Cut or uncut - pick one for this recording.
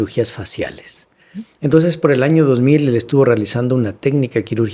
uncut